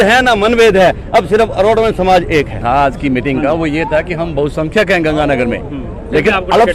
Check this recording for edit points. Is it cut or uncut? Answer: cut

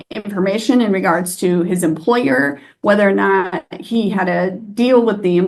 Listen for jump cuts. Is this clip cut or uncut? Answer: uncut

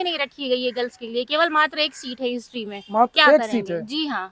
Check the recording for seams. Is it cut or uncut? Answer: uncut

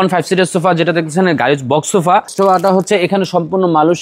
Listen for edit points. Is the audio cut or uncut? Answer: cut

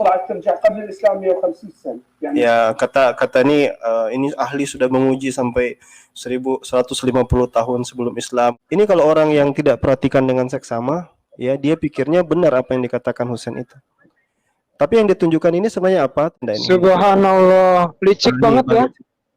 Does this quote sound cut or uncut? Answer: cut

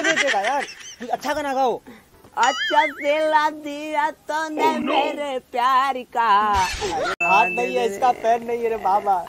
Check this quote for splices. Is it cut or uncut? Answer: cut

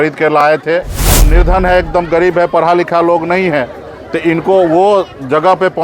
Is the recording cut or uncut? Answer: cut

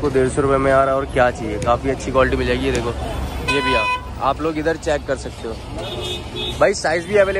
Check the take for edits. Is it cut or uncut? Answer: uncut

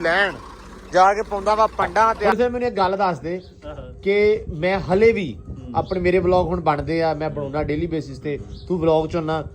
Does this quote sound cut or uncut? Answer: cut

